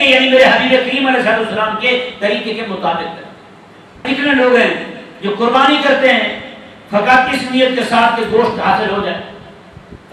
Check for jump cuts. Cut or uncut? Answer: cut